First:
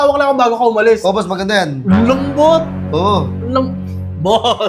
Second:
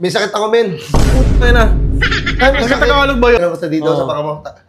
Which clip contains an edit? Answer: second; 1 cut; at 3.4 s

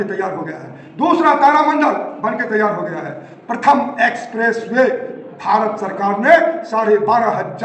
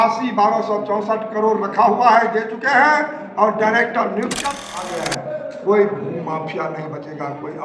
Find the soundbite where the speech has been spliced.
second; 1 cut; at 4.4 s

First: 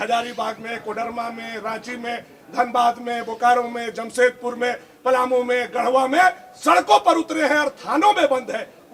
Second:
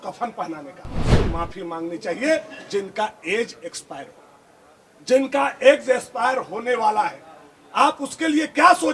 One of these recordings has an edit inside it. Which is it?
second; 1 cut; at 1.1 s

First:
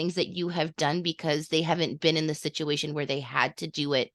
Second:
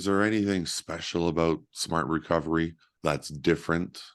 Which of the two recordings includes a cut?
second; 1 cut; at 2.8 s

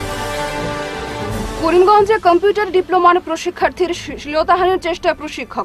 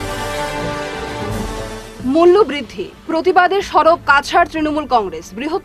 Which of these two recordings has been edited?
first; 1 cut; at 1.0 s

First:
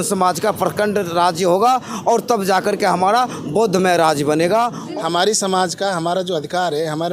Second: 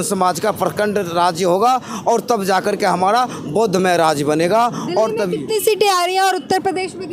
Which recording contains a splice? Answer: first; 1 cut; at 4.8 s

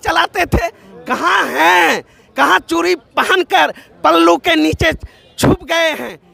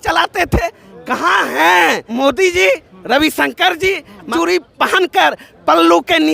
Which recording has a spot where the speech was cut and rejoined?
second; 2 cuts; at 2.0 s, 4.3 s

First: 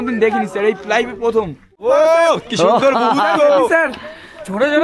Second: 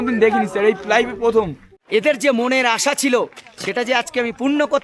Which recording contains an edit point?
second; 1 cut; at 1.7 s

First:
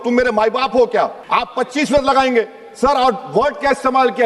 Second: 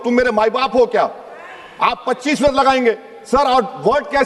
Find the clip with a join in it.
first; 1 cut; at 1.2 s

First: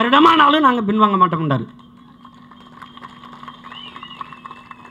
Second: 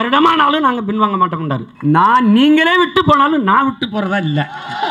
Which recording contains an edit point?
second; 1 cut; at 1.7 s

